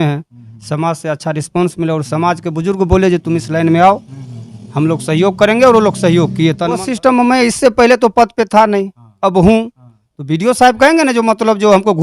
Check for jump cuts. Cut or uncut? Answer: cut